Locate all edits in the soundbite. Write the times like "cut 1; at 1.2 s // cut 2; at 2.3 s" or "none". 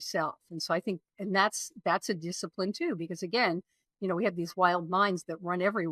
none